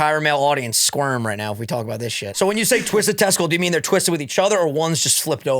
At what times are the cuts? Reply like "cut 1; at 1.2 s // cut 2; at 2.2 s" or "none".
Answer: cut 1; at 2.1 s